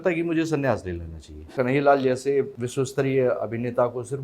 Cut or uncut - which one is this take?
cut